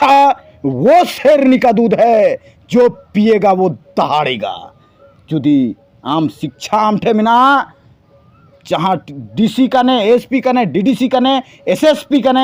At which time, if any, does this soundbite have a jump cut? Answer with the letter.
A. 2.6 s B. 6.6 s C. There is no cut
C